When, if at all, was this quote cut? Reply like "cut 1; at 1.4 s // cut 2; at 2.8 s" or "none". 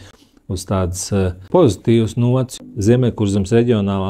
cut 1; at 2.5 s

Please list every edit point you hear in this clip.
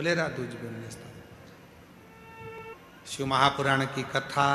cut 1; at 2.6 s

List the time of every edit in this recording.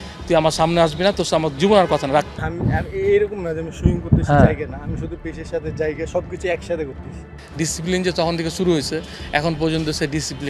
cut 1; at 2.4 s // cut 2; at 7.4 s

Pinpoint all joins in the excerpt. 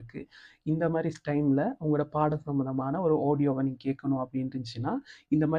none

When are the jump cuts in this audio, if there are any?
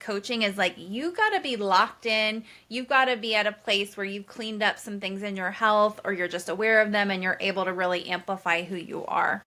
none

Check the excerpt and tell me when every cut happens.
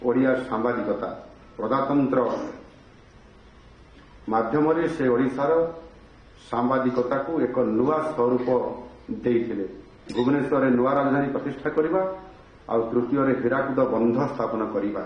cut 1; at 10.0 s

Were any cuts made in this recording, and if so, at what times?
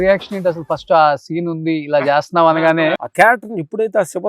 cut 1; at 2.9 s

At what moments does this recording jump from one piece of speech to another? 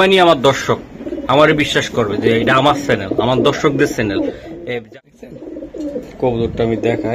cut 1; at 4.6 s

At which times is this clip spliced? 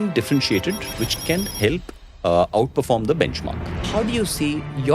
cut 1; at 3.8 s

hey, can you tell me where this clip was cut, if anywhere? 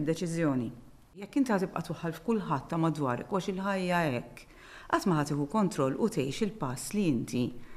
cut 1; at 1.2 s

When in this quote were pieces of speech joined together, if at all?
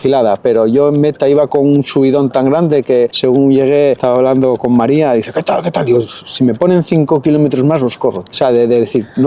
cut 1; at 3.2 s // cut 2; at 4.5 s // cut 3; at 8.2 s

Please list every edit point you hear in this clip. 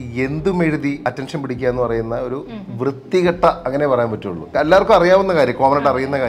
cut 1; at 1.0 s // cut 2; at 4.5 s

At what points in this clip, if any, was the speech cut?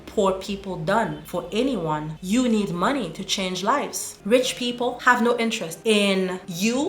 cut 1; at 4.1 s

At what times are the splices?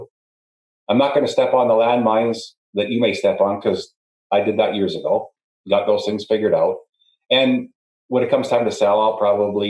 cut 1; at 5.3 s

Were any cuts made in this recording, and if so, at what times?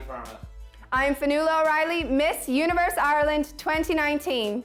none

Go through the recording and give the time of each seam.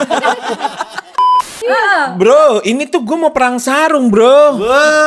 cut 1; at 1.4 s

